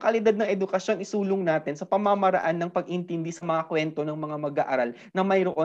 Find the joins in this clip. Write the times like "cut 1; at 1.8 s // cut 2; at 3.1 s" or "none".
none